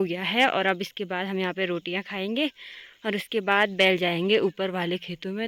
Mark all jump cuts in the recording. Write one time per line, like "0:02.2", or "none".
none